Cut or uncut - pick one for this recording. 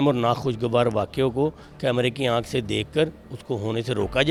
uncut